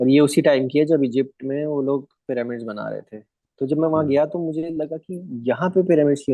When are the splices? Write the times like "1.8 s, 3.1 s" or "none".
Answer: 3.4 s